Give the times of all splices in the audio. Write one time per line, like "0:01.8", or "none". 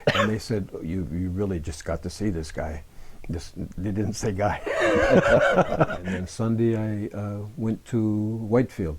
0:06.1